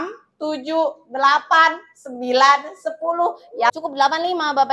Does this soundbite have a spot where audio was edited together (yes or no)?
yes